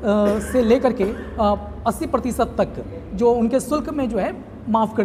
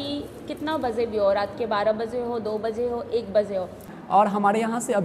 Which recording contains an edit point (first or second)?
second